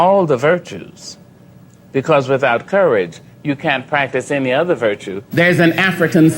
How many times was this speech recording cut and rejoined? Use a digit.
1